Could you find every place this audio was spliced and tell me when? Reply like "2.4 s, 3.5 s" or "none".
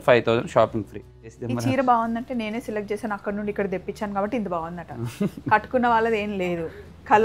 1.4 s